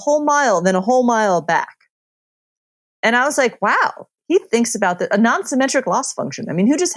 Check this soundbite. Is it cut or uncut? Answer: uncut